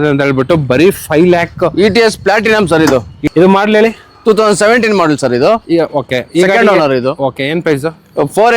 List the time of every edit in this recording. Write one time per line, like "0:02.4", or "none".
0:03.2